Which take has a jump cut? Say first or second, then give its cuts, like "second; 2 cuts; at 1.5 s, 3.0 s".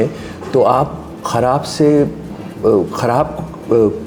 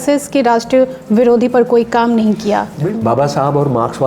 second; 1 cut; at 2.8 s